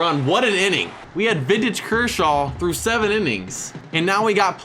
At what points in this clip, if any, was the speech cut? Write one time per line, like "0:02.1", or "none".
0:01.0